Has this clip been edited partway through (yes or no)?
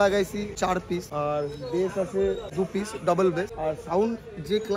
yes